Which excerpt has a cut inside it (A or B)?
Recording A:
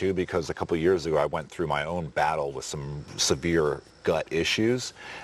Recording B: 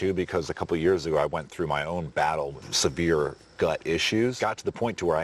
B